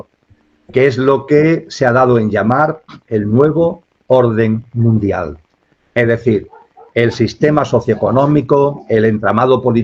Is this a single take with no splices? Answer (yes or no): yes